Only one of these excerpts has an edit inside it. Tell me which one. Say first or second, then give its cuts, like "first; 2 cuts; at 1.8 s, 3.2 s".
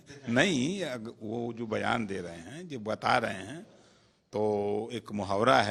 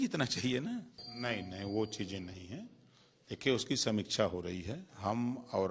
second; 1 cut; at 1.1 s